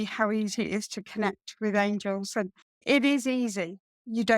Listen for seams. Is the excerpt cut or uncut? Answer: cut